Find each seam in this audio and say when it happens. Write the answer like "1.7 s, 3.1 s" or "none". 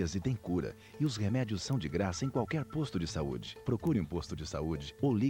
3.5 s